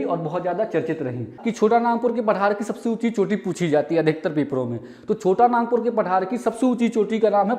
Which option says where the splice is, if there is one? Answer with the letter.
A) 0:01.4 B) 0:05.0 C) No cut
A